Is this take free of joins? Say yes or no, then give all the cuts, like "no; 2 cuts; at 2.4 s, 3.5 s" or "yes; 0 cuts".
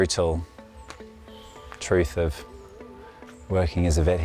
yes; 0 cuts